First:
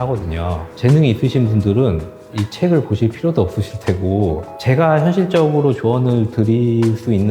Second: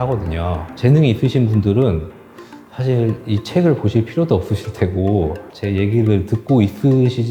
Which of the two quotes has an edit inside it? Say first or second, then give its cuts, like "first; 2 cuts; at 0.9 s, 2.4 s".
first; 2 cuts; at 2.4 s, 4.5 s